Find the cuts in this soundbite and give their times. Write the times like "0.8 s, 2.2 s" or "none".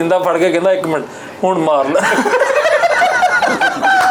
none